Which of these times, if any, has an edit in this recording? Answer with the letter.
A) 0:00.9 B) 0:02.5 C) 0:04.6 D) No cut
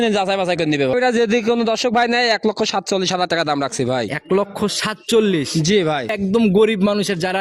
A